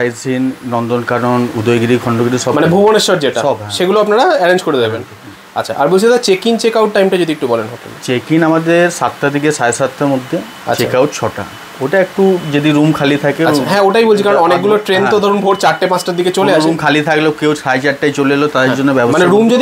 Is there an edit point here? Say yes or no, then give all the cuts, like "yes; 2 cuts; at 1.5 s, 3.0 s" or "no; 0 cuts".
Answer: no; 0 cuts